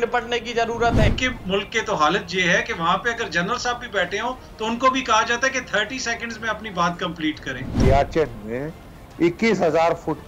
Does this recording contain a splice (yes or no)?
yes